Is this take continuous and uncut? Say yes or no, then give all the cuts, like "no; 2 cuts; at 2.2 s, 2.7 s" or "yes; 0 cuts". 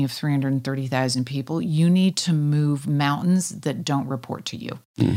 yes; 0 cuts